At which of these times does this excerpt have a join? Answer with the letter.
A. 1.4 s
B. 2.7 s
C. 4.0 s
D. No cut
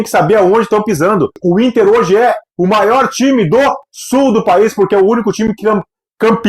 A